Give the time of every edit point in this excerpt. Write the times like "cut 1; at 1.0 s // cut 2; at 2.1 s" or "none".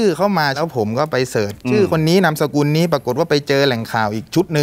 cut 1; at 1.5 s

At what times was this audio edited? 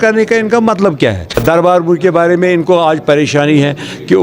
cut 1; at 1.4 s

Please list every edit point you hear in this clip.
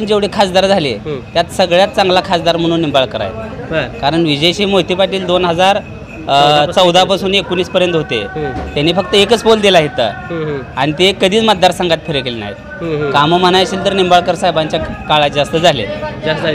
none

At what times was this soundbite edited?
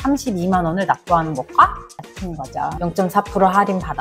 cut 1; at 2.7 s

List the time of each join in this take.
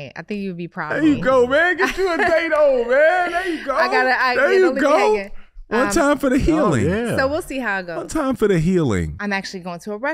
cut 1; at 9.1 s

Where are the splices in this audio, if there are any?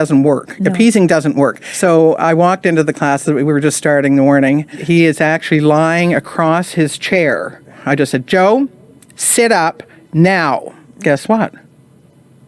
cut 1; at 1.7 s // cut 2; at 4.8 s // cut 3; at 7.8 s // cut 4; at 10.8 s

